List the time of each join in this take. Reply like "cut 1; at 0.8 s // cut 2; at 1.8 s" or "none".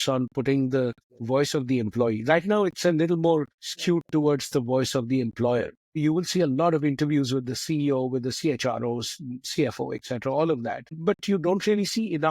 cut 1; at 6.0 s